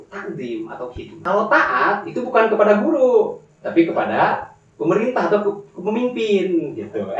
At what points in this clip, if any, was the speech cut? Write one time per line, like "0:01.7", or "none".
0:01.1